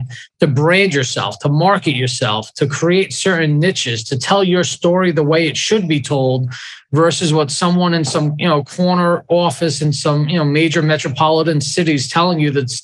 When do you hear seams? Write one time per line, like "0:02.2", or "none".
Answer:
none